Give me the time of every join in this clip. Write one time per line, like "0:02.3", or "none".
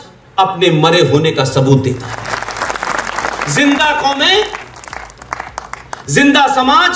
0:02.2